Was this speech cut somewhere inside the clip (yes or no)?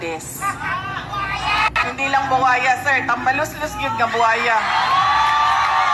yes